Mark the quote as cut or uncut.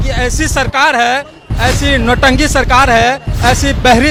uncut